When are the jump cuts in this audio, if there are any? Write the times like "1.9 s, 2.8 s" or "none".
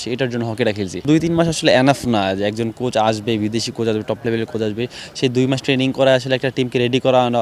1.0 s